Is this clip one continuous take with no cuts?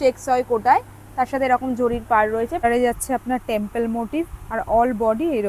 no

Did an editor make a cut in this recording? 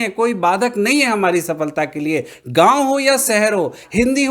no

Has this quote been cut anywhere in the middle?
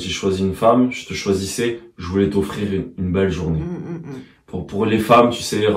no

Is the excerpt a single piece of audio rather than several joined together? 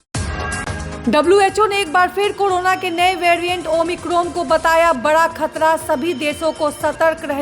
no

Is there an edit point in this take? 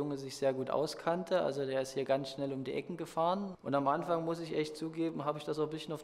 yes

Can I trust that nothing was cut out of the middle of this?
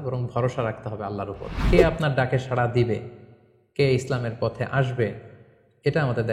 no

